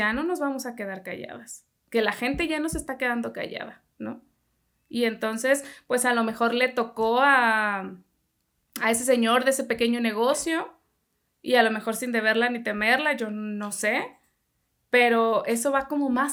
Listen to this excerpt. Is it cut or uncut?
uncut